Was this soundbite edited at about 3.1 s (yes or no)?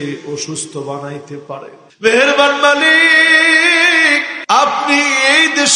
no